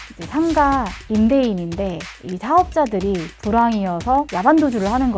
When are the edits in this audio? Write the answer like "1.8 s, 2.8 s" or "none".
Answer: none